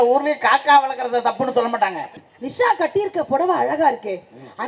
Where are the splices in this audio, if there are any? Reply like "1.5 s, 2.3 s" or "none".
2.2 s